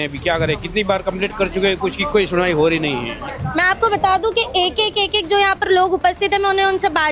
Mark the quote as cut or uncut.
uncut